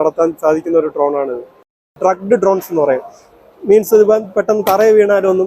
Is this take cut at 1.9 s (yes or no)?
yes